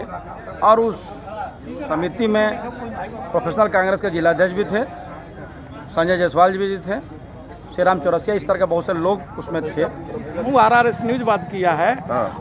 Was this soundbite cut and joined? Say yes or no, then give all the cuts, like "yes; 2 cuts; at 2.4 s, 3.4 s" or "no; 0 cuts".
yes; 1 cut; at 10.5 s